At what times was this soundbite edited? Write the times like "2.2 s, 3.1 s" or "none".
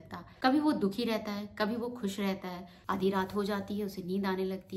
2.7 s